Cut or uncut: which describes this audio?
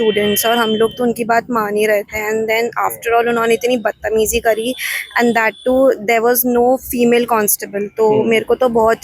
uncut